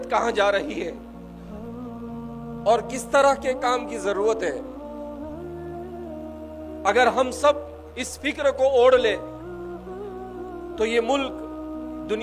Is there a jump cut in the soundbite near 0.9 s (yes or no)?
yes